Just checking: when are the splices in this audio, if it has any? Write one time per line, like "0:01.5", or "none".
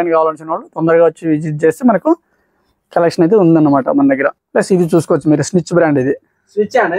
0:04.3